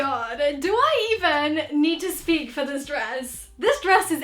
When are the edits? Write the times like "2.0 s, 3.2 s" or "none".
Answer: none